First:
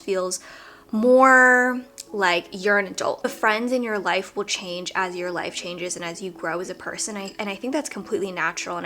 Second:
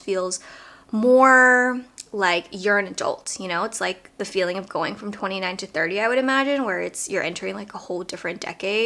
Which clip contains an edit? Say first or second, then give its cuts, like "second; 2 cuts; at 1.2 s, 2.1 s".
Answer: first; 1 cut; at 3.3 s